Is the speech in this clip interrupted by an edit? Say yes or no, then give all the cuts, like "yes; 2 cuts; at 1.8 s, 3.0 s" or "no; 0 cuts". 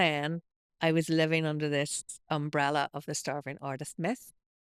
no; 0 cuts